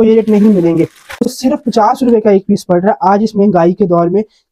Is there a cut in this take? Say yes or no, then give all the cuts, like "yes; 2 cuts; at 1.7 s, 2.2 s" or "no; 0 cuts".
yes; 1 cut; at 1.1 s